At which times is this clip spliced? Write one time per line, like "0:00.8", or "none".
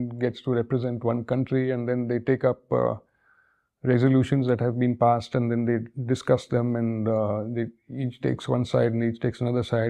none